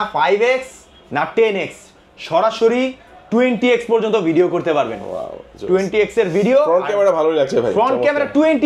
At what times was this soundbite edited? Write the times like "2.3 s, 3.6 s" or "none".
none